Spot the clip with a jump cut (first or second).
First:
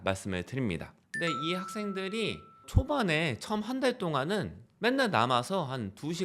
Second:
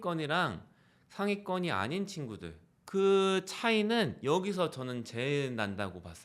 first